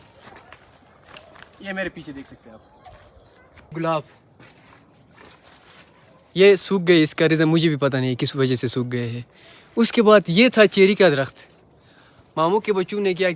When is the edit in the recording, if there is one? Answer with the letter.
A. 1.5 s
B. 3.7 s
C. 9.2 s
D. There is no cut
B